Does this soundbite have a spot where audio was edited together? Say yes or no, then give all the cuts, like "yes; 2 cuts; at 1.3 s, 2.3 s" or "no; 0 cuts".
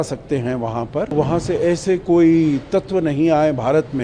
yes; 1 cut; at 1.1 s